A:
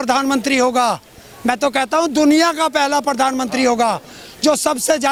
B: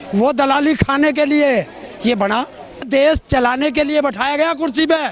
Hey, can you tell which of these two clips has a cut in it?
B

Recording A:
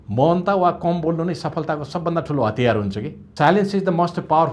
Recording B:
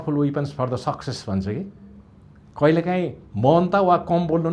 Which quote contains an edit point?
A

